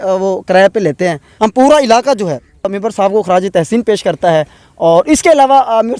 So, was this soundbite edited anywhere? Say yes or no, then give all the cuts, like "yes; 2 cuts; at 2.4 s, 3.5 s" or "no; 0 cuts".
yes; 2 cuts; at 1.3 s, 2.7 s